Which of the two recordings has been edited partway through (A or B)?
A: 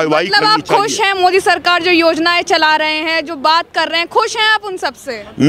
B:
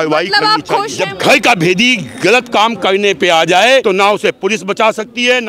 B